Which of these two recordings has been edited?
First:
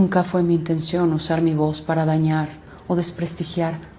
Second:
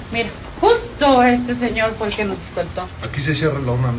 second; 1 cut; at 3.0 s

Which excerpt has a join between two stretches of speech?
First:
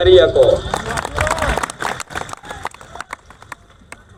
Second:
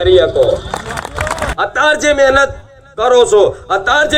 second; 1 cut; at 1.5 s

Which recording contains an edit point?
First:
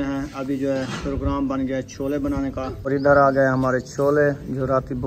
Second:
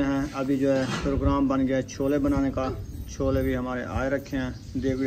first; 1 cut; at 2.8 s

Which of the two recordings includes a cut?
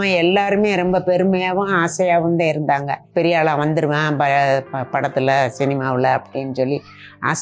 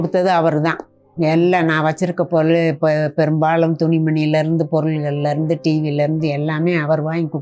first; 1 cut; at 3.0 s

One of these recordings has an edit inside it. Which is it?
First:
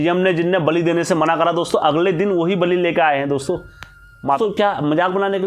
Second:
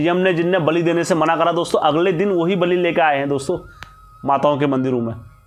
first; 1 cut; at 4.4 s

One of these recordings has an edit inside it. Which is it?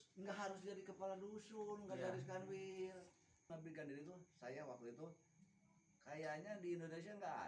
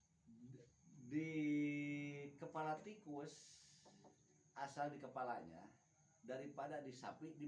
first; 1 cut; at 3.5 s

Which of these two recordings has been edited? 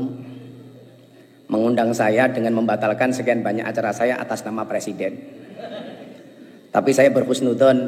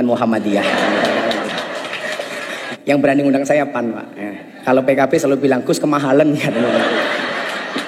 second; 1 cut; at 2.7 s

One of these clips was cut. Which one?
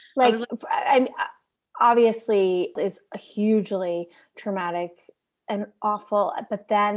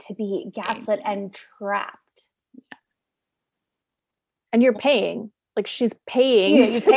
first; 1 cut; at 2.8 s

